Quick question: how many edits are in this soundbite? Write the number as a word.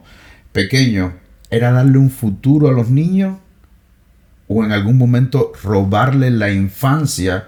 zero